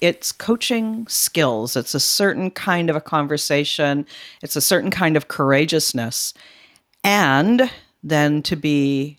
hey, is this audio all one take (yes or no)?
yes